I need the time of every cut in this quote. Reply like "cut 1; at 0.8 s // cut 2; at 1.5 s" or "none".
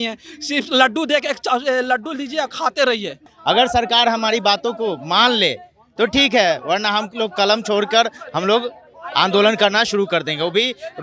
cut 1; at 3.3 s